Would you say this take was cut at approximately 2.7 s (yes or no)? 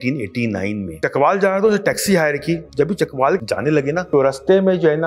yes